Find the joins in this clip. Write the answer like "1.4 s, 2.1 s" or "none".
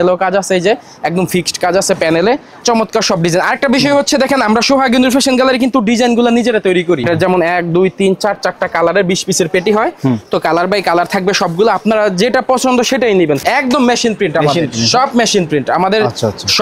2.6 s, 7.0 s, 13.4 s

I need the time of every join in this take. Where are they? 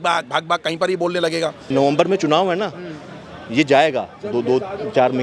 1.6 s

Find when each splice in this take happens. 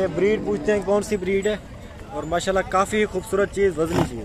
none

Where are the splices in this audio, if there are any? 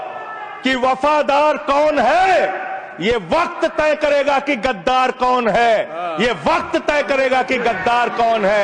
none

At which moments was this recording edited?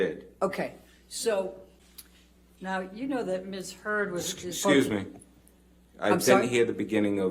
1.7 s

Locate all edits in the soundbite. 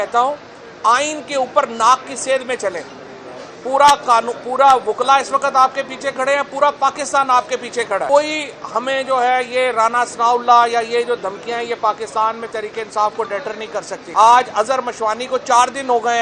8.1 s, 14.0 s

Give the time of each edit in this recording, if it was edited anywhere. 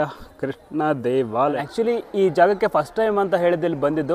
1.6 s

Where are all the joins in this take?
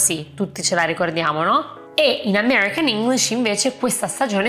1.8 s

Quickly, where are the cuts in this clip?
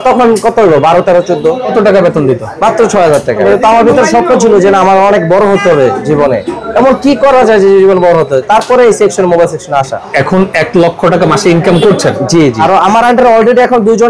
1.7 s, 3.4 s, 10.0 s, 12.6 s

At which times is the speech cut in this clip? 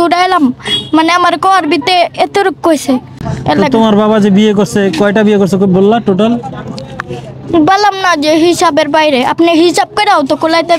3.3 s

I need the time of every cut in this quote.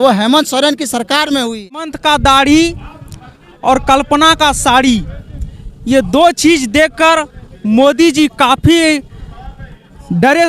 1.9 s

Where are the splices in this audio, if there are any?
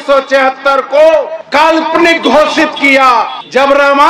none

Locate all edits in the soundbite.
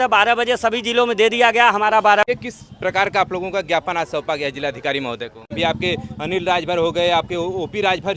2.3 s, 5.5 s

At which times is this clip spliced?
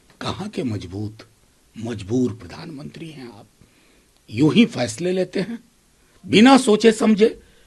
none

